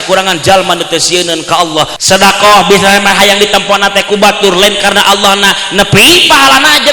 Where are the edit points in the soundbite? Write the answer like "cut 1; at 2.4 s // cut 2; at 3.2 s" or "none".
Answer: cut 1; at 2.0 s

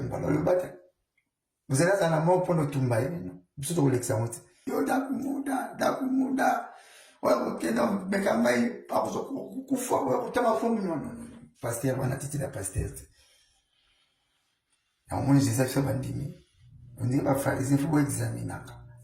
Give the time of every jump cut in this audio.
cut 1; at 4.7 s

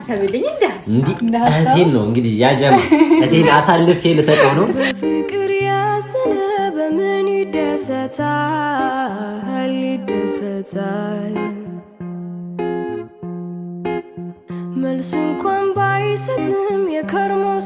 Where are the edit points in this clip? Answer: cut 1; at 4.8 s

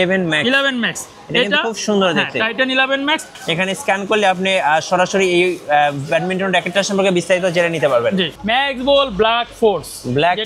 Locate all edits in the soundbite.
cut 1; at 3.3 s // cut 2; at 8.3 s

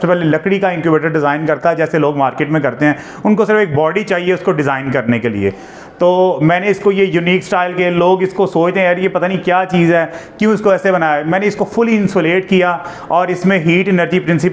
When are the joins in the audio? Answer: none

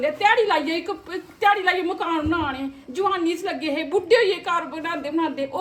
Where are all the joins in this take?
none

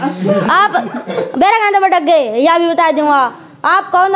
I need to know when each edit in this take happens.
none

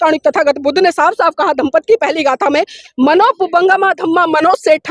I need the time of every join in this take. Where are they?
cut 1; at 2.8 s

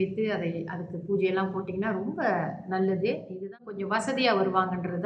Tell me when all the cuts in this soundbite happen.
cut 1; at 3.7 s

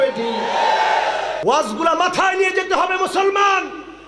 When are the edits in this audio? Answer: cut 1; at 1.4 s

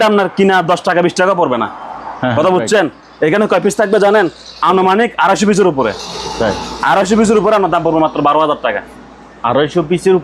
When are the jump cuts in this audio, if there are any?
none

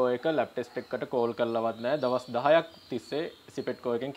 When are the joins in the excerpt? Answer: none

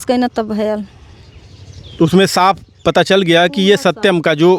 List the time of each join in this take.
none

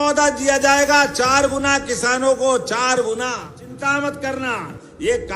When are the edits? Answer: cut 1; at 3.7 s

